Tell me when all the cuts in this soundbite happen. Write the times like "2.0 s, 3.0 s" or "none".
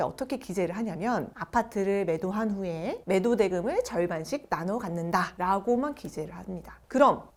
none